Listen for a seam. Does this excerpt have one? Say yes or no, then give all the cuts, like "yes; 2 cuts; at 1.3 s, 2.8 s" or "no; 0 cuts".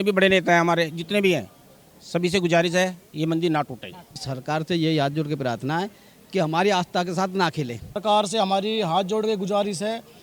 yes; 2 cuts; at 4.3 s, 8.0 s